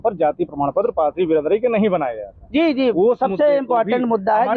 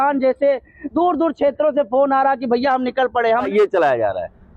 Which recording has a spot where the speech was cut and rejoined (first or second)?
second